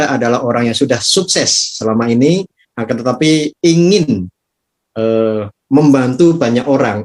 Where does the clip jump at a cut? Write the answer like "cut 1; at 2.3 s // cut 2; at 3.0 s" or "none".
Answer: none